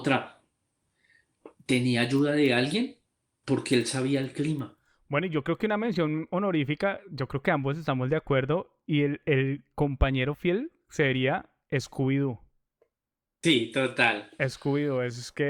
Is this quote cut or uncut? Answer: cut